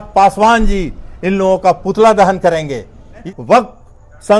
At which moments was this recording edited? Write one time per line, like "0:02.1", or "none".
0:03.3